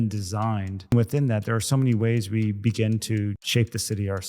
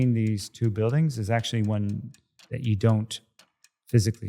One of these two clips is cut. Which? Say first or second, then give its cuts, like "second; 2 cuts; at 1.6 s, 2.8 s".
first; 2 cuts; at 0.9 s, 3.4 s